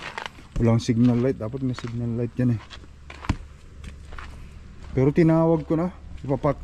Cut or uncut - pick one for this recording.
uncut